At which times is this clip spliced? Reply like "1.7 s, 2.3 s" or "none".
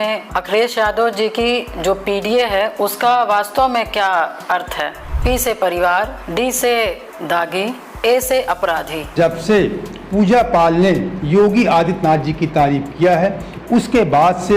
9.1 s